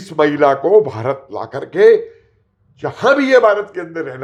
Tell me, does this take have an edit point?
no; 0 cuts

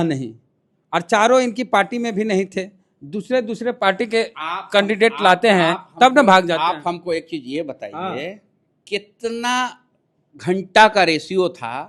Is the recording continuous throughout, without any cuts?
yes; 0 cuts

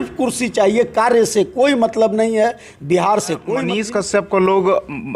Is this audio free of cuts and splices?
no; 1 cut; at 3.7 s

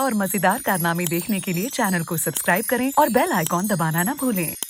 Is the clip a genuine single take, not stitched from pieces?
yes; 0 cuts

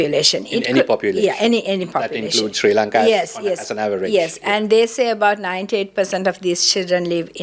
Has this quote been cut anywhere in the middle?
no; 0 cuts

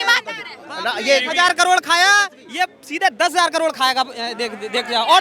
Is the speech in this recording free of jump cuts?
yes; 0 cuts

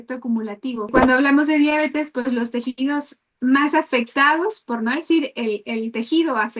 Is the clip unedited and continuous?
no; 1 cut; at 0.9 s

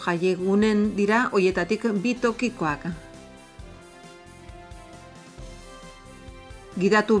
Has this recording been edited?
yes; 2 cuts; at 3.0 s, 6.4 s

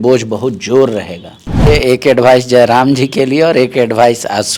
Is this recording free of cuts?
no; 1 cut; at 1.7 s

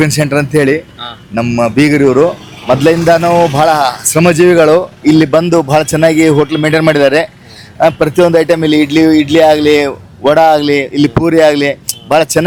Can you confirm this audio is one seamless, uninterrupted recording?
yes; 0 cuts

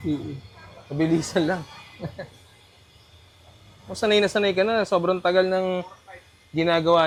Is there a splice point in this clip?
no; 0 cuts

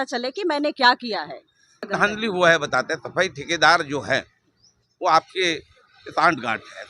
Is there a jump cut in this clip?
yes; 1 cut; at 1.9 s

